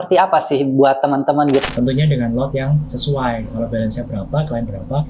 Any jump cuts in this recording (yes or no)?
yes